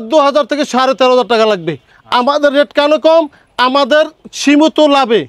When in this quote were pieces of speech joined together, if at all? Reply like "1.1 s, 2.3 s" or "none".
none